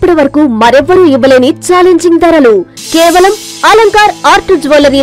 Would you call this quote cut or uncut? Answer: uncut